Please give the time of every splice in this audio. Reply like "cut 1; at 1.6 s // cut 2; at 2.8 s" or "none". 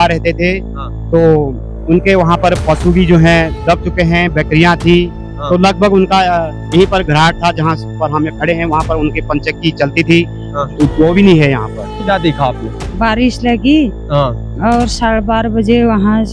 cut 1; at 12.0 s